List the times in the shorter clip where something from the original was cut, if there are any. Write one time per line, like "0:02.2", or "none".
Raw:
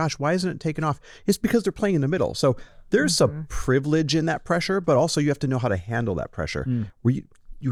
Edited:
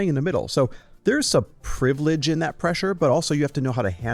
none